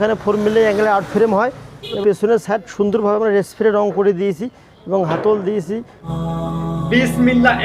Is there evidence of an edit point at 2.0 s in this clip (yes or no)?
yes